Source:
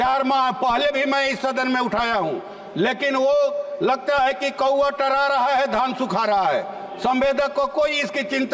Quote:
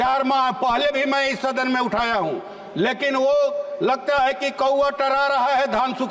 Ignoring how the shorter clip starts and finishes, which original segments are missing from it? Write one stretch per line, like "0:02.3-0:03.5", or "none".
none